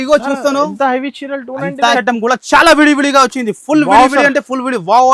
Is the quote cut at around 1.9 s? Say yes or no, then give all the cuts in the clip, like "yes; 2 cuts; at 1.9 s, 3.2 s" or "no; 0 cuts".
yes; 1 cut; at 1.9 s